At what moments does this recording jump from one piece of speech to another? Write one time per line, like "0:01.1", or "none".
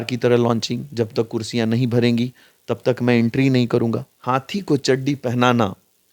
0:04.1

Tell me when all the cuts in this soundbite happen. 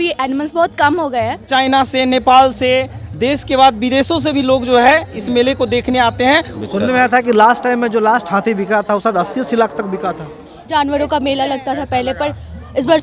0:01.4
0:06.5
0:10.5

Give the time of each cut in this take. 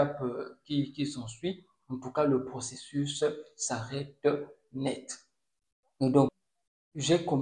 0:06.3

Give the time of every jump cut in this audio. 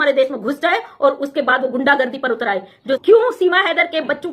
0:03.0

